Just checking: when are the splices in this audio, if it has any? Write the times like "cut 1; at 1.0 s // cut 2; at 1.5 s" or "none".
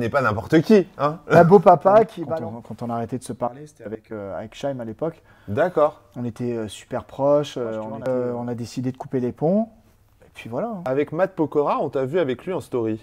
cut 1; at 2.2 s // cut 2; at 8.1 s // cut 3; at 10.8 s